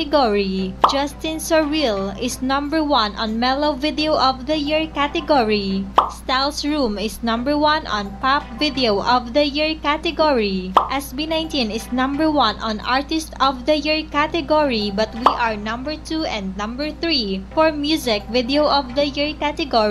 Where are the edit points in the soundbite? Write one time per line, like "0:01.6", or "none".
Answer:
0:05.7
0:09.4
0:14.8

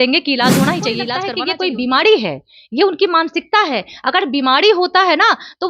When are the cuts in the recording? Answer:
0:01.2

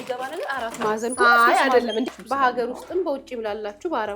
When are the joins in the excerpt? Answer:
0:02.1

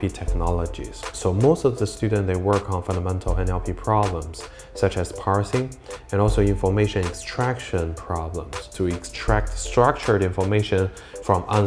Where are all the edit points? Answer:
0:01.1
0:08.6

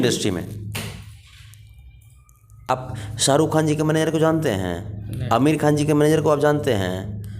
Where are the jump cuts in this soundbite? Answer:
0:02.7

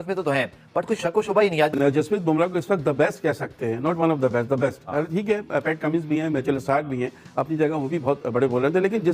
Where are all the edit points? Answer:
0:01.7

